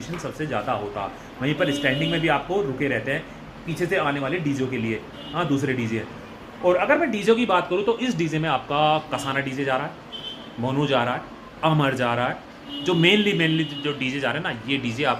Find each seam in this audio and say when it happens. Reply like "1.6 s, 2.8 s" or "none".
none